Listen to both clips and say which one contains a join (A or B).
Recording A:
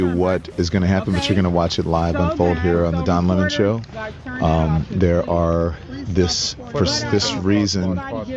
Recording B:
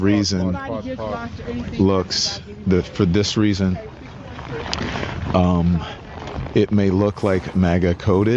A